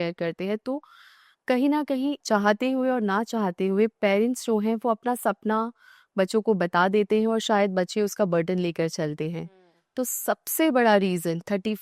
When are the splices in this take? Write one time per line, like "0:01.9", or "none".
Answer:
0:02.2